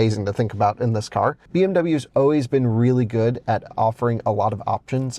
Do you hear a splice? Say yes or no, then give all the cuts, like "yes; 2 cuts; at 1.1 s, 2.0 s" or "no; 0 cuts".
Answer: yes; 1 cut; at 1.4 s